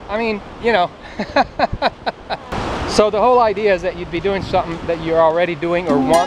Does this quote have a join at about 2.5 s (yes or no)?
yes